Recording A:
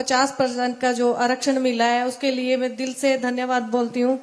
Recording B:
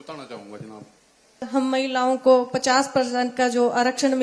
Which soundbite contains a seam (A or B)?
B